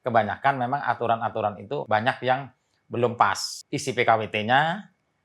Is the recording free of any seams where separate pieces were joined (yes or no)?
no